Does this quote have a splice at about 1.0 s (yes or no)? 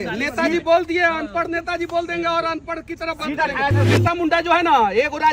no